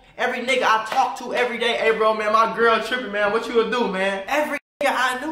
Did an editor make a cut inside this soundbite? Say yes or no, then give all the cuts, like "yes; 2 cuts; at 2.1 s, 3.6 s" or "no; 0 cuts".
yes; 1 cut; at 4.2 s